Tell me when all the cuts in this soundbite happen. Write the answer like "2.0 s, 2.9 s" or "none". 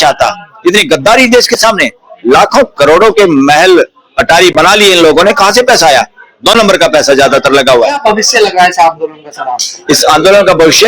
none